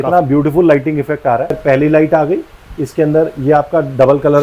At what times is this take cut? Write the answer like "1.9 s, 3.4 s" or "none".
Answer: 1.6 s

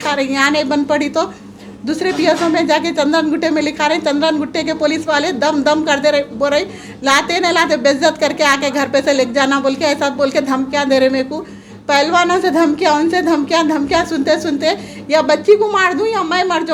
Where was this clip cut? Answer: none

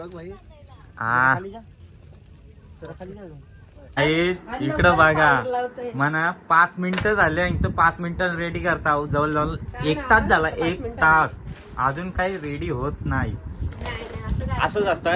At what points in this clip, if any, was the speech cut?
4.0 s

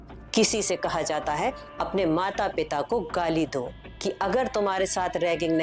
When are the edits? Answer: 3.9 s

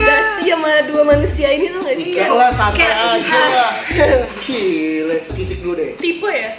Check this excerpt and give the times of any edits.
5.3 s

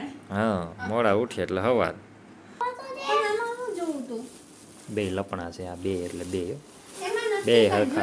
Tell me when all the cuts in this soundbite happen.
2.6 s

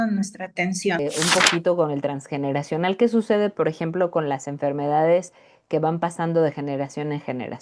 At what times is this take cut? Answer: 1.0 s

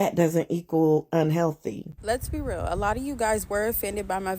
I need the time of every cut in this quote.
1.9 s

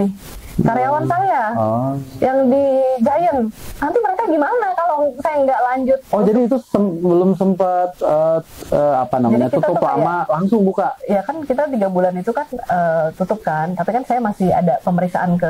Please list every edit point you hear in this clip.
none

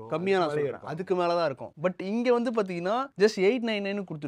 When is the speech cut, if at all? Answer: 3.1 s

